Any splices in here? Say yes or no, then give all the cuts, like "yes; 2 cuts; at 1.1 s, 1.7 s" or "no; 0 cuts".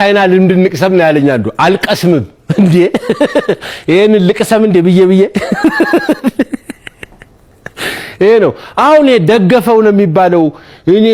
no; 0 cuts